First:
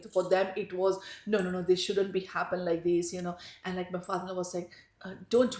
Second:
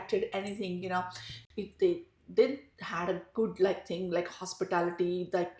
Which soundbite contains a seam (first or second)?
second